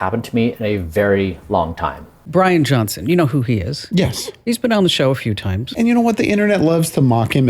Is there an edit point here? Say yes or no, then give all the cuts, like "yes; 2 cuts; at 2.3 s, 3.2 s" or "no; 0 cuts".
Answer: yes; 3 cuts; at 2.2 s, 4.5 s, 5.6 s